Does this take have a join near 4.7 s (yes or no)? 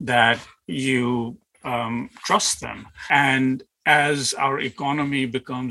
no